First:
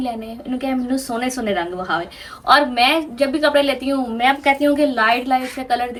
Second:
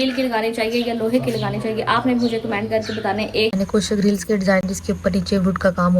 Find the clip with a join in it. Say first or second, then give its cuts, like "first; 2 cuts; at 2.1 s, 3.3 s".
second; 2 cuts; at 3.5 s, 4.7 s